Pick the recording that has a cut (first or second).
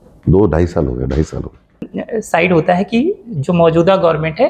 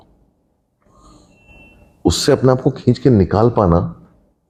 first